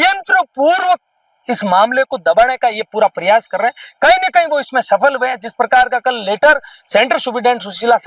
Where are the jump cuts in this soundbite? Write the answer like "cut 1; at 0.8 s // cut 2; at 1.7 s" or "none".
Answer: none

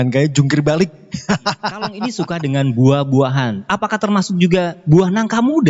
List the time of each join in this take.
cut 1; at 2.0 s

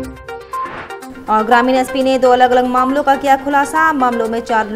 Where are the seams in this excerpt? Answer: cut 1; at 1.0 s

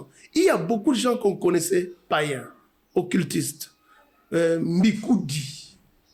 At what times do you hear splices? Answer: none

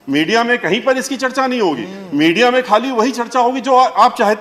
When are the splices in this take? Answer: none

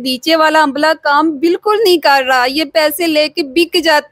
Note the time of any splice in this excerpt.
none

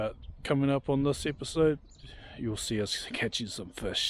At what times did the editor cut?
cut 1; at 2.2 s

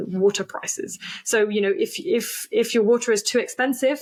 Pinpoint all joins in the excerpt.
none

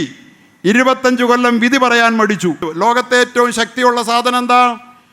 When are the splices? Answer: cut 1; at 2.7 s

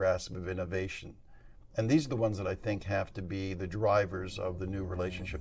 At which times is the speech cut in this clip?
none

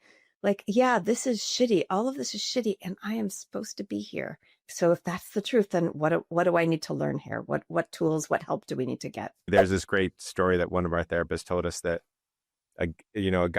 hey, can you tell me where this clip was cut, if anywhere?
cut 1; at 4.6 s // cut 2; at 9.5 s

